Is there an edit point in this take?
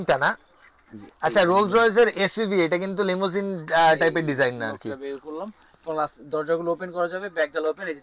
no; 0 cuts

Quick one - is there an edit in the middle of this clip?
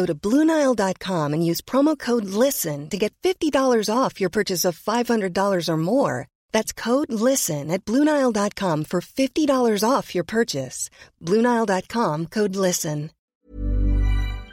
yes; 1 cut; at 13.2 s

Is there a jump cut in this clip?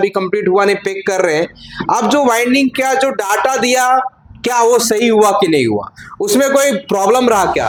no; 0 cuts

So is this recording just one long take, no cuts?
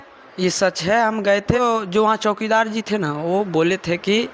no; 1 cut; at 1.6 s

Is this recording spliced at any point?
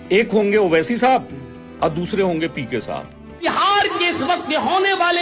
yes; 1 cut; at 3.4 s

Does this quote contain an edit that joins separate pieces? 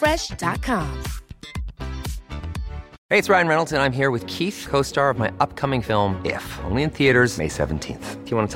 yes; 1 cut; at 3.0 s

